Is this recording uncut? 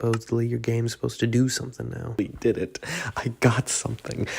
no; 1 cut; at 2.2 s

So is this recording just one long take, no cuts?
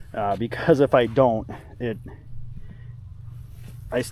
yes; 0 cuts

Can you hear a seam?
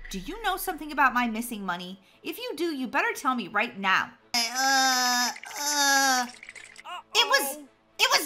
yes; 1 cut; at 4.4 s

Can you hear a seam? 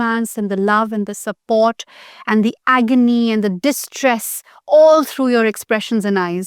no; 0 cuts

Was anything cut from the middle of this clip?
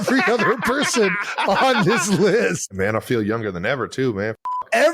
yes; 1 cut; at 2.8 s

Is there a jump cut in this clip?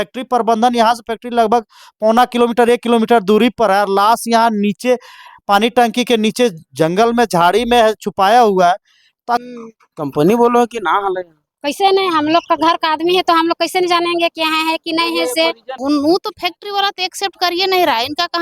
yes; 2 cuts; at 9.4 s, 15.8 s

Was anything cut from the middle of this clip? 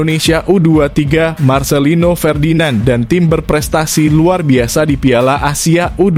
no; 0 cuts

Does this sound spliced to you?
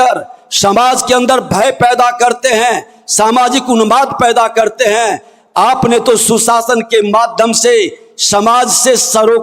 no; 0 cuts

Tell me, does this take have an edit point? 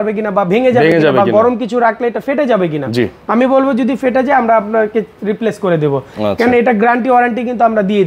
no; 0 cuts

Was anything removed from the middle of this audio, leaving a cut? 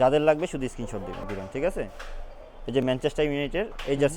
yes; 1 cut; at 1.2 s

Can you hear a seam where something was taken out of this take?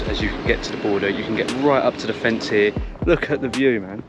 yes; 1 cut; at 2.9 s

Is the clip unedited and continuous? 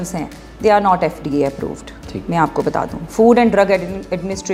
yes; 0 cuts

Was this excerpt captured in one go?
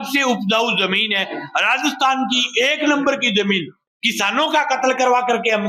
no; 1 cut; at 3.9 s

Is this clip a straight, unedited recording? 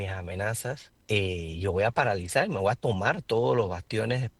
no; 1 cut; at 0.9 s

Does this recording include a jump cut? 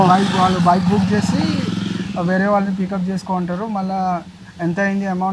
no; 0 cuts

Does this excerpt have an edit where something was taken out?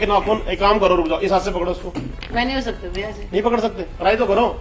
no; 0 cuts

